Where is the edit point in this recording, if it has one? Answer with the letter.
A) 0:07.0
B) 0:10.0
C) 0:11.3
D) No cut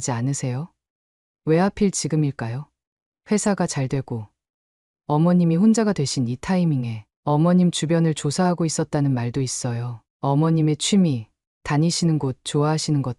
A